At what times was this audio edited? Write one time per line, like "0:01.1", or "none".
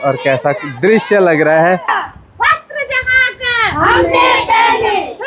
0:01.9